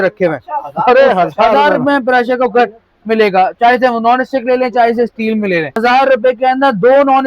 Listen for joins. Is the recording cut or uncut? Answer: cut